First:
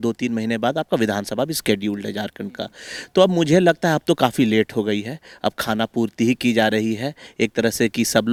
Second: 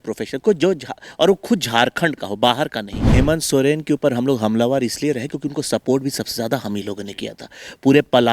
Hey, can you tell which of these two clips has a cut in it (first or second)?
second